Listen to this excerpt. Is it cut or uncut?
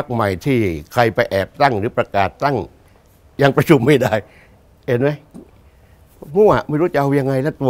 uncut